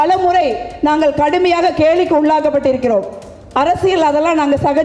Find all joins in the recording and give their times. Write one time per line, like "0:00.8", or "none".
none